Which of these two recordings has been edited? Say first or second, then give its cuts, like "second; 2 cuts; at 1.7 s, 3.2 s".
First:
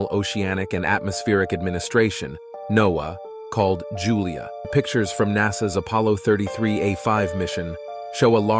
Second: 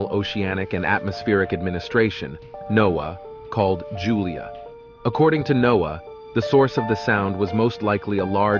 first; 1 cut; at 4.7 s